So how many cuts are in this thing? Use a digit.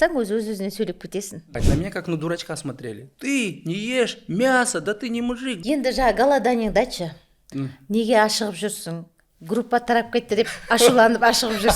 3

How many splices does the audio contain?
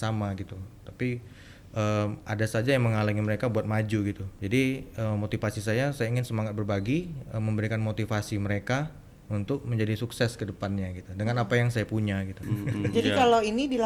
0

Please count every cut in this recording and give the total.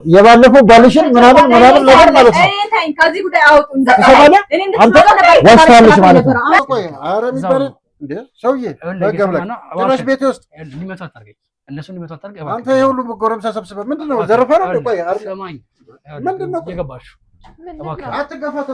2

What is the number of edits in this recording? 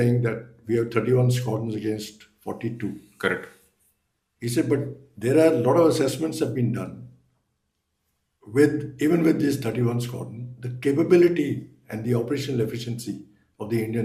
0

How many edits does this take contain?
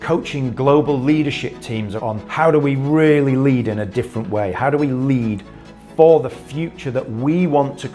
1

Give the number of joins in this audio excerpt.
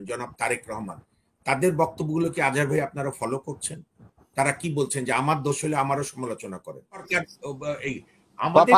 1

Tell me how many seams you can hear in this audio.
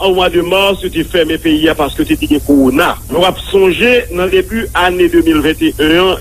1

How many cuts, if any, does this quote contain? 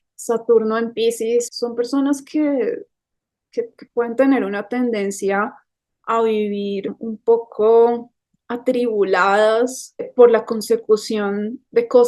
3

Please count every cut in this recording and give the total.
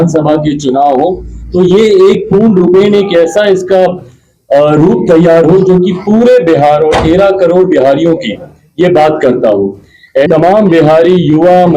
1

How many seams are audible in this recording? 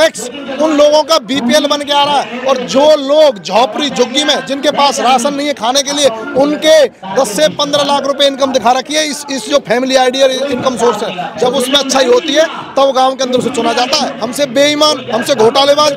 2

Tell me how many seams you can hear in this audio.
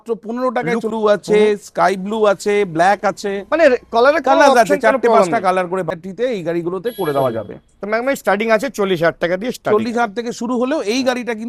2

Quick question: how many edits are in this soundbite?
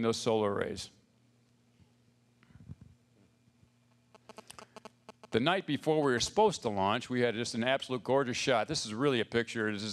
1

